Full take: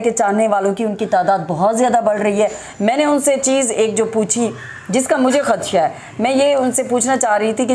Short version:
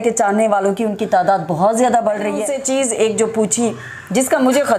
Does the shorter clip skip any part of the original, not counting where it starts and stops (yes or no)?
yes